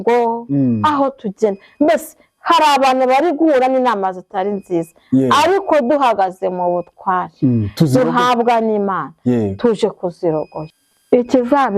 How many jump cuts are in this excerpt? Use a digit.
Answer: 1